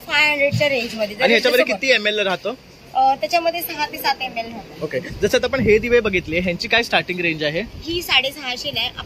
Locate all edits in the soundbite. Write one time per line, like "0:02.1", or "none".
none